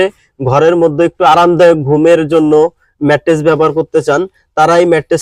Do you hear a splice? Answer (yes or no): no